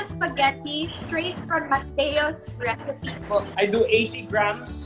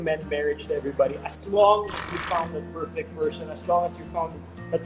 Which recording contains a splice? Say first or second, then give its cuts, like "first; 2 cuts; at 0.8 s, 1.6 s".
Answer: first; 2 cuts; at 1.0 s, 3.5 s